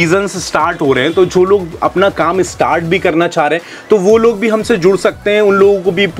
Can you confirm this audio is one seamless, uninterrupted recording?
yes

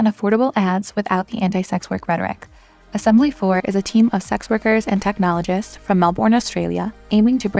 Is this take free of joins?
yes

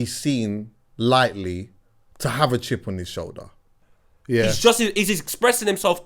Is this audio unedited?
no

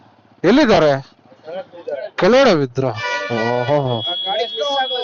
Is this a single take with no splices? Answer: yes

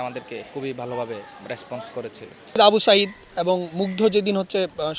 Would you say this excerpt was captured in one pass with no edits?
no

